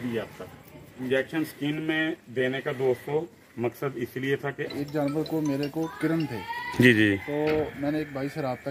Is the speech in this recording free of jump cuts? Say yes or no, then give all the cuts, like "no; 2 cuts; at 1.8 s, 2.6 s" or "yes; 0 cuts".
no; 2 cuts; at 0.9 s, 4.7 s